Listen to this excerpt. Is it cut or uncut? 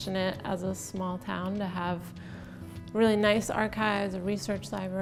uncut